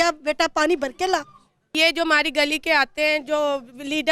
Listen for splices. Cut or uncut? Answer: cut